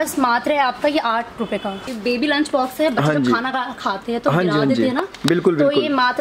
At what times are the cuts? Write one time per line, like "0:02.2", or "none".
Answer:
0:01.8